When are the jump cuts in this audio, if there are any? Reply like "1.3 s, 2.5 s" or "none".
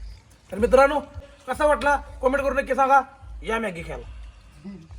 1.4 s